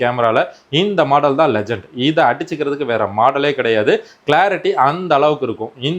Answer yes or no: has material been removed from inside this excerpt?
no